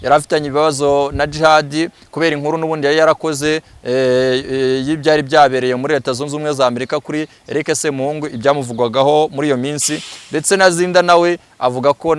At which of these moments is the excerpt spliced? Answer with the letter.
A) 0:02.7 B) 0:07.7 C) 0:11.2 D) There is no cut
D